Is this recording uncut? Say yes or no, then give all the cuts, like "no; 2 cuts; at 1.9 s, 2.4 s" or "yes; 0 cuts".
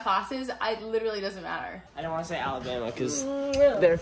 no; 1 cut; at 1.8 s